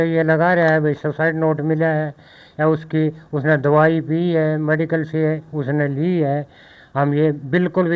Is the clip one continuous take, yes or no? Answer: yes